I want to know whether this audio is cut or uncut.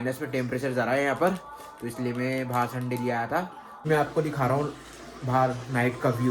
cut